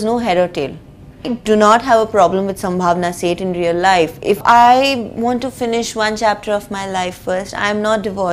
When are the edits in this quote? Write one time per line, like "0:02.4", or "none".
0:01.3
0:04.4